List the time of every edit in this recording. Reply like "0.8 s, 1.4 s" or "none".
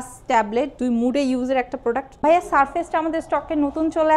2.1 s